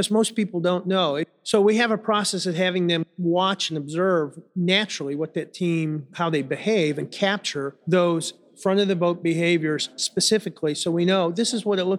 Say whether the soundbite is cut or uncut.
cut